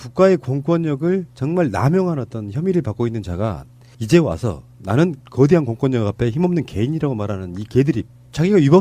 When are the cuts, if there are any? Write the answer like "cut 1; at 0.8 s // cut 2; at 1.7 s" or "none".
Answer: cut 1; at 6.5 s